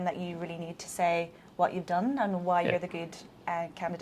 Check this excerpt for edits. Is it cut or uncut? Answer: uncut